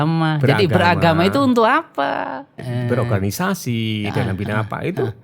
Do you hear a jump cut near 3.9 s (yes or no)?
no